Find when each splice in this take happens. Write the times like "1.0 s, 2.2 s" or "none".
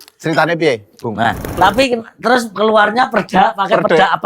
1.6 s